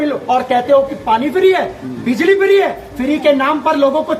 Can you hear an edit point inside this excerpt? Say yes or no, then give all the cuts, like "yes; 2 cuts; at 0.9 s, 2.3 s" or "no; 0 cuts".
no; 0 cuts